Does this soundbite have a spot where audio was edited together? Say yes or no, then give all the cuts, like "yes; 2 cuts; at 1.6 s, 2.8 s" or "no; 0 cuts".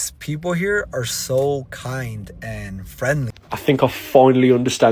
yes; 1 cut; at 3.5 s